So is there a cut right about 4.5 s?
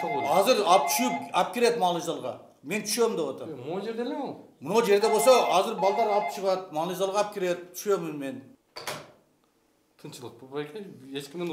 no; 1 cut; at 8.6 s

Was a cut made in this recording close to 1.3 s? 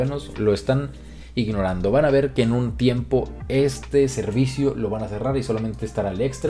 no; 0 cuts

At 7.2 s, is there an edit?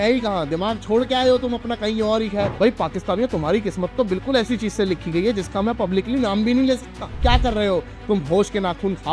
yes; 2 cuts; at 2.5 s, 7.2 s

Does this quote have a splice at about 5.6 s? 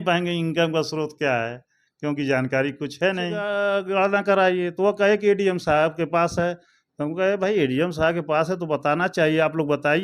no; 1 cut; at 3.5 s

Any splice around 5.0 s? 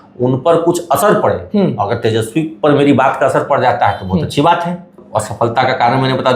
yes; 1 cut; at 5.0 s

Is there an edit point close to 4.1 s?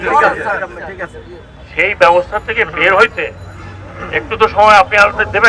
no; 0 cuts

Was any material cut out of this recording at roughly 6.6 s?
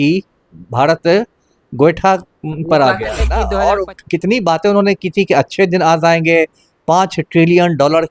no; 1 cut; at 3.4 s

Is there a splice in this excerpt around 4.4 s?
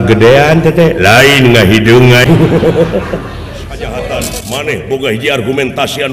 yes; 2 cuts; at 2.2 s, 4.4 s

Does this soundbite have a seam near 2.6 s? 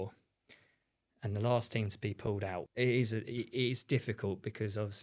yes; 1 cut; at 2.6 s

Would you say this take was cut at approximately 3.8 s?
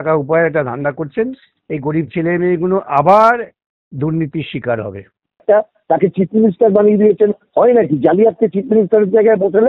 no; 1 cut; at 5.4 s

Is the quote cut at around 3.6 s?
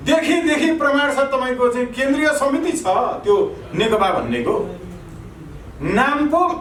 no; 0 cuts

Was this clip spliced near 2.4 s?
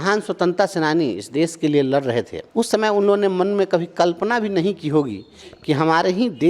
yes; 1 cut; at 2.4 s

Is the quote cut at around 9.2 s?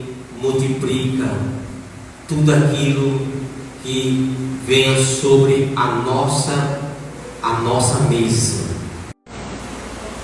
yes; 1 cut; at 9.2 s

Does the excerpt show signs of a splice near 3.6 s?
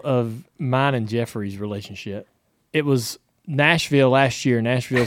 no; 1 cut; at 2.3 s

